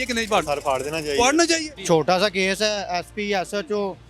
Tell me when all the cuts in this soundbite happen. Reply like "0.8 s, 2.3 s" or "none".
1.7 s